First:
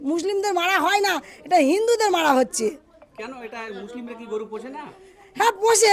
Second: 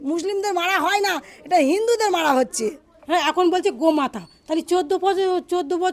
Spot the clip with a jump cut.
second; 1 cut; at 2.9 s

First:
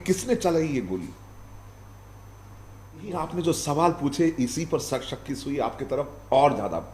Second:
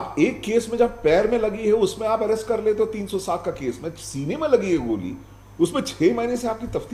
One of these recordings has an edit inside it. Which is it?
first; 1 cut; at 3.2 s

